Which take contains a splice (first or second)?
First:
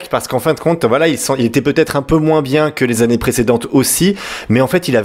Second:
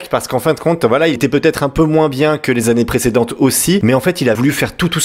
second